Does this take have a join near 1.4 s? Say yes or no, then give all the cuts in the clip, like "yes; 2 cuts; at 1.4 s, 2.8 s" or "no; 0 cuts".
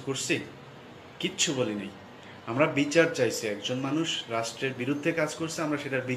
no; 1 cut; at 2.7 s